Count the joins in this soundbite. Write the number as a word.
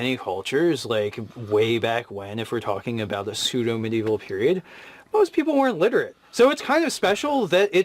one